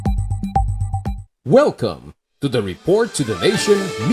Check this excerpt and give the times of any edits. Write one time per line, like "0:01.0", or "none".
0:01.3